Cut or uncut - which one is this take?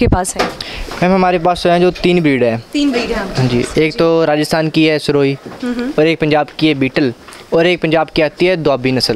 uncut